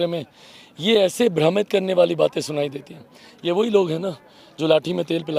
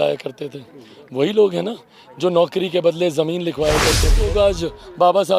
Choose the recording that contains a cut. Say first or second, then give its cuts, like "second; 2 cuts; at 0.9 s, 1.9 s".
second; 1 cut; at 4.2 s